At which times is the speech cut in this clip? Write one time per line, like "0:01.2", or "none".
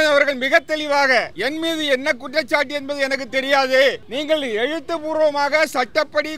0:01.3
0:04.1

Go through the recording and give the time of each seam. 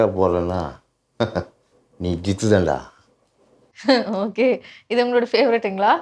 none

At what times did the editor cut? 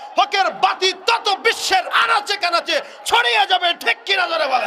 none

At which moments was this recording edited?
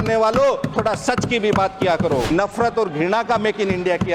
0:02.3

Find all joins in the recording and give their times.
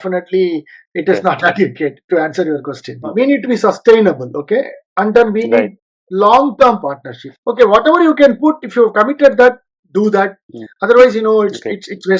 0:03.0
0:07.3

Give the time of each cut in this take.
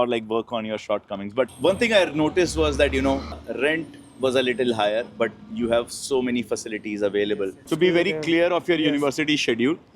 0:01.5
0:07.6

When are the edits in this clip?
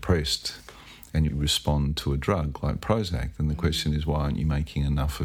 0:01.3

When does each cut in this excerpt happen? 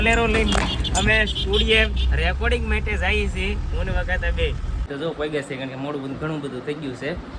0:04.9

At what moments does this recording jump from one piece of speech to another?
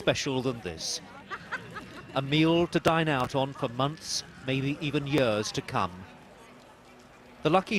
0:06.6

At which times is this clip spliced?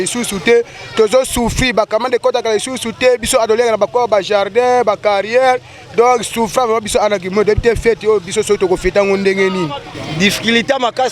0:10.0

